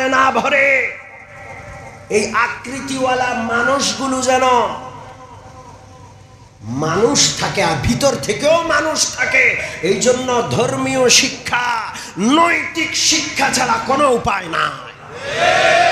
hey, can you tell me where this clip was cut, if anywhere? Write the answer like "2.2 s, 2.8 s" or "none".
none